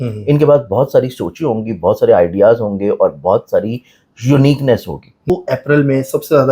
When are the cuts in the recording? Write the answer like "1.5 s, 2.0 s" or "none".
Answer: 5.3 s